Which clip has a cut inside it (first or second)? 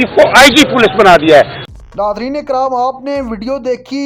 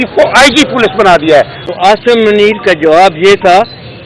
second